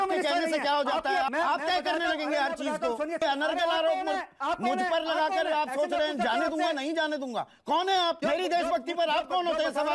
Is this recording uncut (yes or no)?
no